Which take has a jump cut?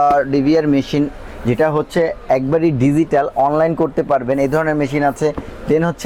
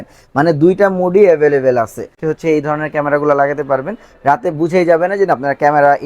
second; 1 cut; at 2.2 s

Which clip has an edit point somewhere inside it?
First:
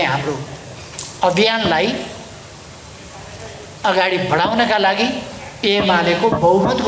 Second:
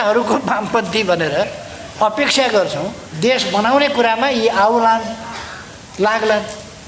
second; 1 cut; at 3.0 s

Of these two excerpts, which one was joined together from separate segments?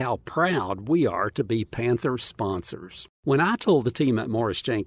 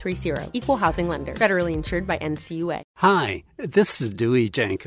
second; 1 cut; at 2.9 s

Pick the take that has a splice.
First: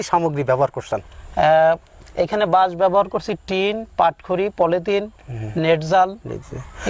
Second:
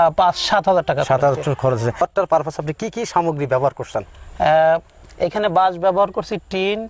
second; 1 cut; at 2.0 s

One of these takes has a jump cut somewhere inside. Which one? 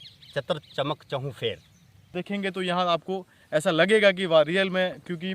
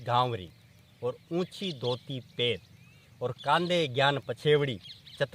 first; 1 cut; at 2.1 s

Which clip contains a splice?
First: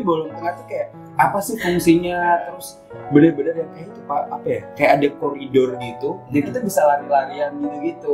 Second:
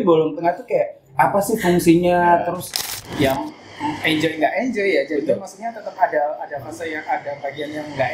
second; 1 cut; at 3.0 s

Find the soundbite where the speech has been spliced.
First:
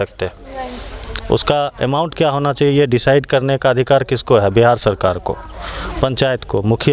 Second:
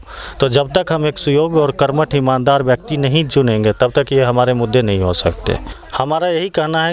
second; 1 cut; at 5.8 s

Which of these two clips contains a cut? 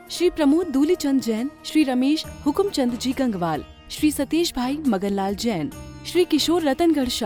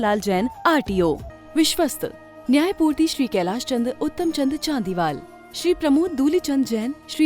second; 1 cut; at 1.3 s

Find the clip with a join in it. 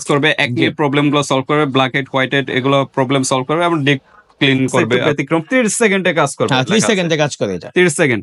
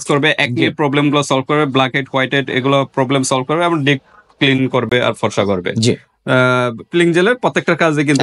first; 1 cut; at 4.9 s

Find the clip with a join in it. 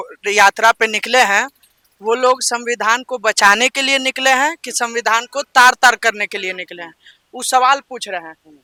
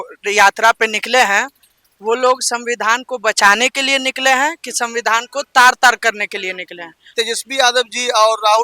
second; 1 cut; at 7.0 s

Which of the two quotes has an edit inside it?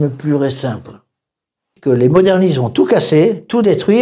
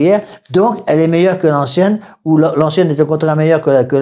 first; 1 cut; at 1.7 s

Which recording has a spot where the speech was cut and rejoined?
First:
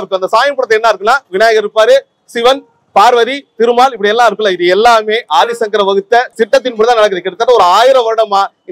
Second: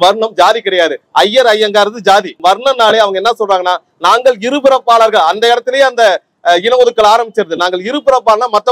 second; 1 cut; at 2.4 s

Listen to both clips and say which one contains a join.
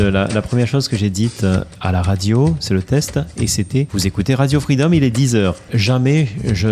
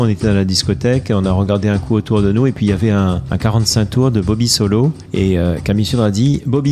first; 2 cuts; at 3.9 s, 5.7 s

